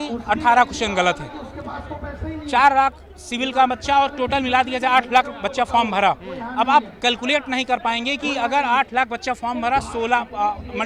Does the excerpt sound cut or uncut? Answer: uncut